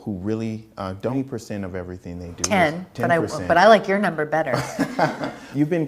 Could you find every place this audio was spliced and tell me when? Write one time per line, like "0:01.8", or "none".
0:01.1